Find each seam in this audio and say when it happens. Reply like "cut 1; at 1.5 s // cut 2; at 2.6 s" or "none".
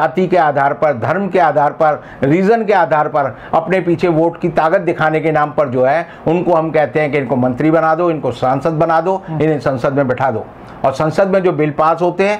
none